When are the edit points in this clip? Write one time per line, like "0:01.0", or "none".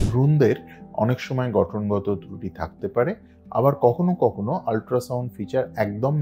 none

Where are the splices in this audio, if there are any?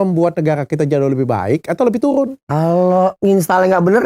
0:02.4
0:03.2

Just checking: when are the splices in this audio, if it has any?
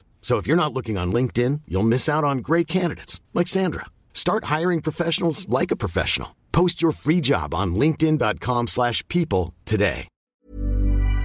0:10.3

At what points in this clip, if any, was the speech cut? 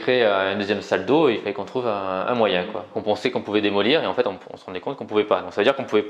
0:03.0

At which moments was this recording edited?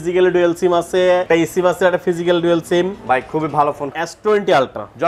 0:01.2
0:03.9

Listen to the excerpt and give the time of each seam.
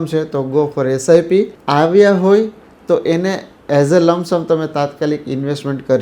0:01.6

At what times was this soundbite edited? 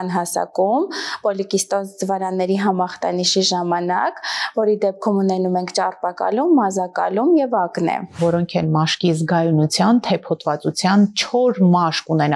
0:08.2

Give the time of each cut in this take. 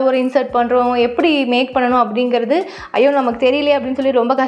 none

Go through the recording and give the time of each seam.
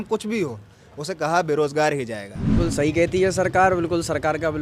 0:02.5

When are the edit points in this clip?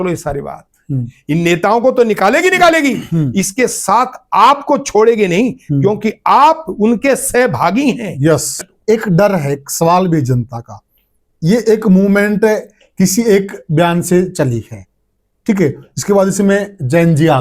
0:08.6

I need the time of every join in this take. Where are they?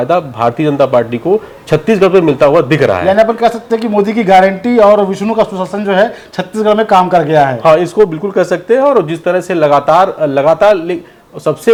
none

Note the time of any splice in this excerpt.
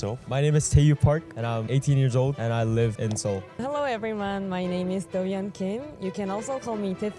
0:01.6
0:02.4
0:03.4

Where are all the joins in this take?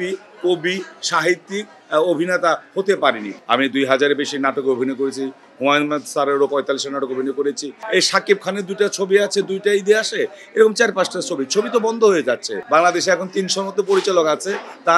0:03.3
0:07.8
0:12.5

